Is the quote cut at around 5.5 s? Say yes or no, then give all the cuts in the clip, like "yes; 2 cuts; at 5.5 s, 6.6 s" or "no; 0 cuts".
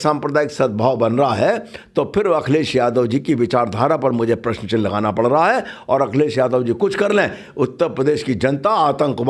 no; 0 cuts